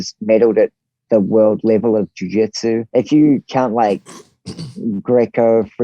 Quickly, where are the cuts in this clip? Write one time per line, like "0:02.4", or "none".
0:02.8